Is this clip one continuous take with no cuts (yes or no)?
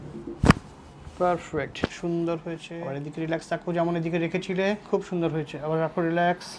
no